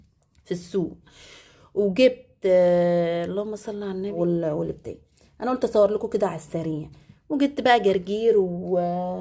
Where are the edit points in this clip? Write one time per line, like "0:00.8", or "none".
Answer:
0:04.1